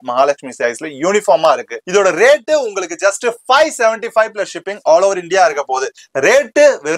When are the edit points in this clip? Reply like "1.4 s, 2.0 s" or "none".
1.8 s, 6.0 s